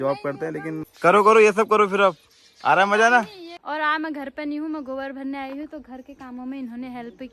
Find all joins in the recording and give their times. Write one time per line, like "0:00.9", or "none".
0:00.9
0:03.5